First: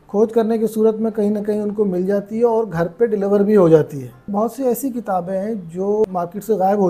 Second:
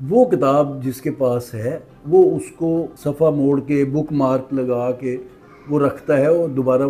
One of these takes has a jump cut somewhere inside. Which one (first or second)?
first